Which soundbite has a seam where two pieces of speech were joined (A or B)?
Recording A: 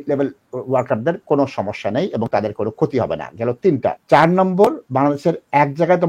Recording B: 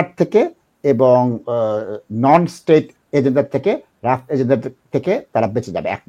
A